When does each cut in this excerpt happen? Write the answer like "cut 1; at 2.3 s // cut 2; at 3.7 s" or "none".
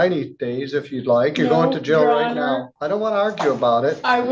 cut 1; at 3.1 s